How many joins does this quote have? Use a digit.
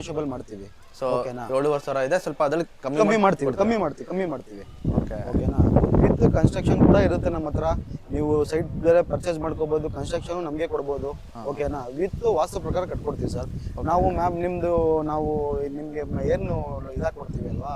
0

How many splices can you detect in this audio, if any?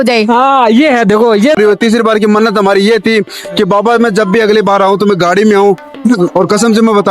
1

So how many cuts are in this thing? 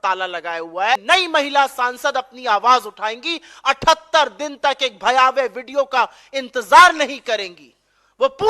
1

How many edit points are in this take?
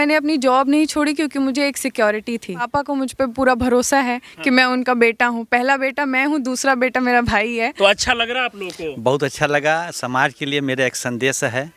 2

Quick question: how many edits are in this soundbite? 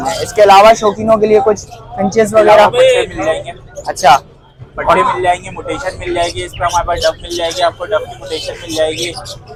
0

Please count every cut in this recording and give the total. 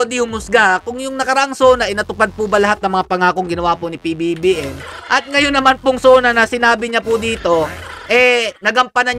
0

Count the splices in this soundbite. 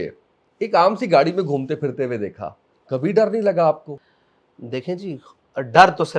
1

